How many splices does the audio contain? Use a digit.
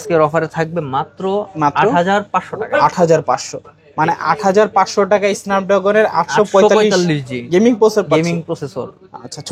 0